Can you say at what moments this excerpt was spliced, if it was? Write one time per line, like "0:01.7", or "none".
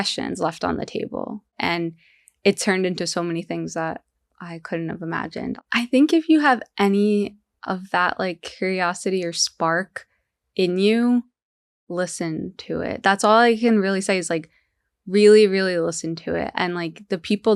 0:01.5
0:05.5